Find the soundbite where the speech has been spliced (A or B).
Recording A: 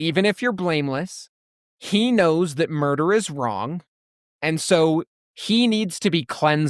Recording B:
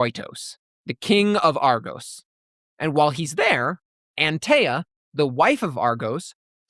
A